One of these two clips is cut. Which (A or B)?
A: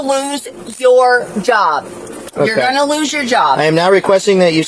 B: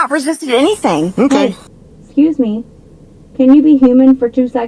B